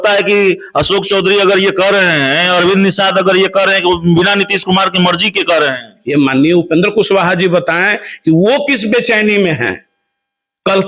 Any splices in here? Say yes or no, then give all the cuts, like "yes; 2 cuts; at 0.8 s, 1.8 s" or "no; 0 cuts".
yes; 1 cut; at 6.0 s